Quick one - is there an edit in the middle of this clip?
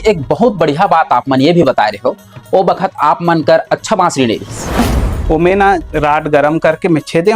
yes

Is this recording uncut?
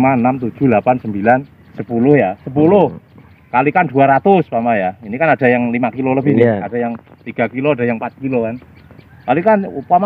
yes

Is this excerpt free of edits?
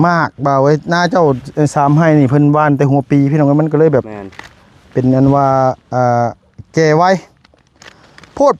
yes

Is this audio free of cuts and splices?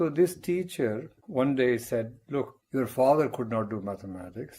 no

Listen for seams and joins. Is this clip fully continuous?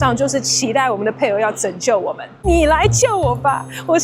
no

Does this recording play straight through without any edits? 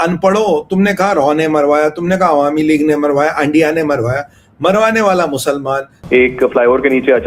no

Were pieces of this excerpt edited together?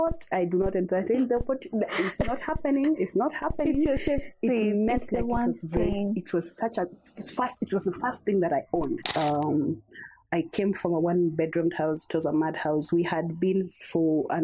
yes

